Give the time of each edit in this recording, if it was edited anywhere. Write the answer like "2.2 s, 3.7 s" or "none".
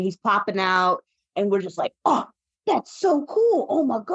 1.2 s